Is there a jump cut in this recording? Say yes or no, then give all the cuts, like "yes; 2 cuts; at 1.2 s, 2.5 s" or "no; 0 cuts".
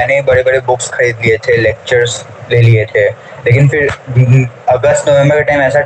no; 0 cuts